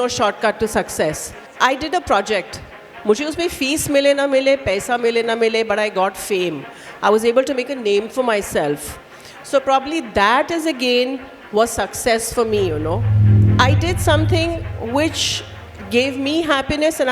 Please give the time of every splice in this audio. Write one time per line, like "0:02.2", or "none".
0:01.4